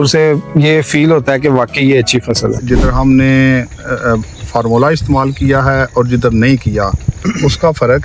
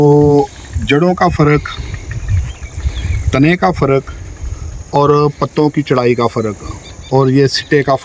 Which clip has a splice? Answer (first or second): first